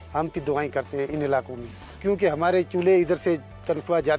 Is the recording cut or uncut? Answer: uncut